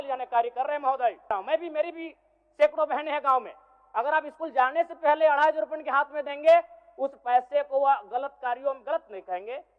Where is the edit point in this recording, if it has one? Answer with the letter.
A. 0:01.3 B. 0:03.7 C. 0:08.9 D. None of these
A